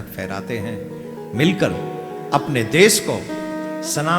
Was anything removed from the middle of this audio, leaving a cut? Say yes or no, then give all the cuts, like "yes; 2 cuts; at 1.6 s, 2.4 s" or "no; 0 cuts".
no; 0 cuts